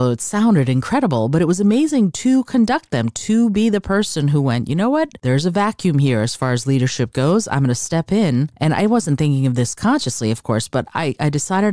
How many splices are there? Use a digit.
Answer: 2